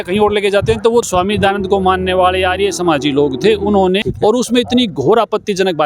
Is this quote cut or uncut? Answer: cut